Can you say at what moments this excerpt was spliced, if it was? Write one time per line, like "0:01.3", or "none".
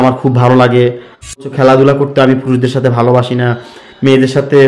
0:01.4